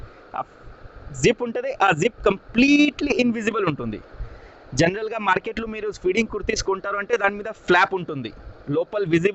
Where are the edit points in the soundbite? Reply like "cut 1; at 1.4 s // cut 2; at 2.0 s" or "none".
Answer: none